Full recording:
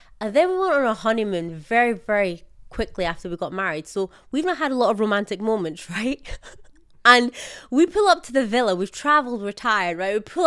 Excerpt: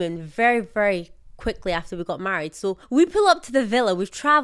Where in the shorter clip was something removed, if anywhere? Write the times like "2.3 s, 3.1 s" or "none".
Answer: 2.8 s